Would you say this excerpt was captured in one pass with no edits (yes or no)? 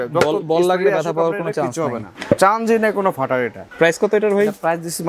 no